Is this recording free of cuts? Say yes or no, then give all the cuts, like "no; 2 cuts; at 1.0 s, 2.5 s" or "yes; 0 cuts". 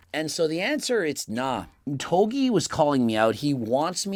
yes; 0 cuts